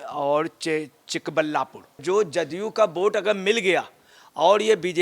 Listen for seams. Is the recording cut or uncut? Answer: cut